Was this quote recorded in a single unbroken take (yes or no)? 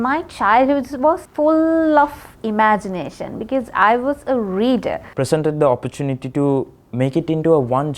no